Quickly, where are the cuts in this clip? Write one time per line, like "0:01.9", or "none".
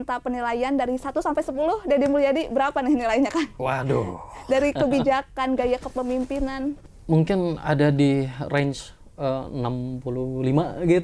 0:06.8